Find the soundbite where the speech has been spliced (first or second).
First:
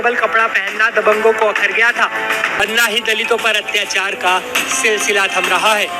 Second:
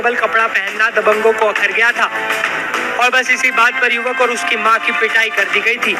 first